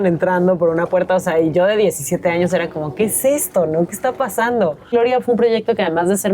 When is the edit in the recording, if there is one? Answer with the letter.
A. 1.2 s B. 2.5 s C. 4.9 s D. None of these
C